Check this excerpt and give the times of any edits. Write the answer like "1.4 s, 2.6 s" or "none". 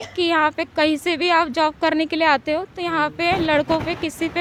none

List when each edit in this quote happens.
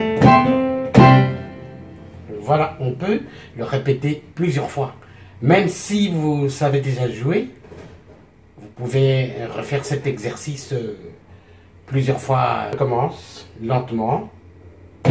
12.8 s

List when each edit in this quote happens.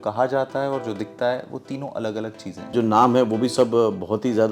2.7 s

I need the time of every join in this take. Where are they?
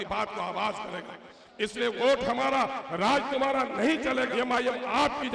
4.3 s

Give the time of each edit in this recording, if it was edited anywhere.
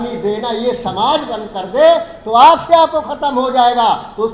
none

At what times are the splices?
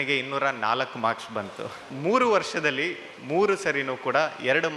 1.9 s

